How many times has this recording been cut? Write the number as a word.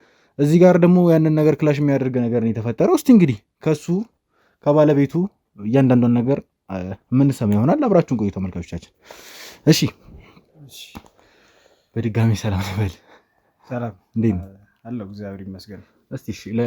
zero